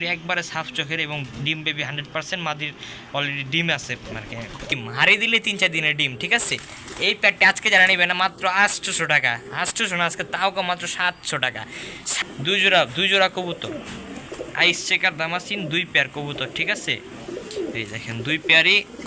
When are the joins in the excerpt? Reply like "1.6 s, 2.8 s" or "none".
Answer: 4.7 s, 12.1 s